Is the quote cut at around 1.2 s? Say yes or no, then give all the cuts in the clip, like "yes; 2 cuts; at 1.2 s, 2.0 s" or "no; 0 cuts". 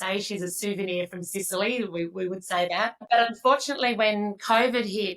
no; 1 cut; at 3.0 s